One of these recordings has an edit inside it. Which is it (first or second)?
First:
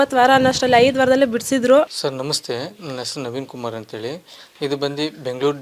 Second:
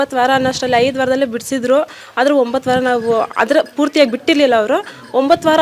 first